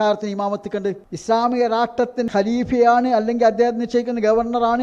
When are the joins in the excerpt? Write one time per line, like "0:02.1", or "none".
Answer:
0:01.1
0:02.3